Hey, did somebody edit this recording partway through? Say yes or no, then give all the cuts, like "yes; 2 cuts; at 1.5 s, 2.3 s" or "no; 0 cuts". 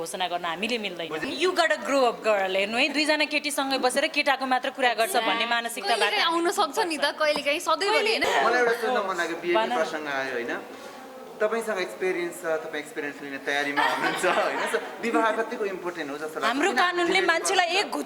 yes; 2 cuts; at 1.2 s, 8.2 s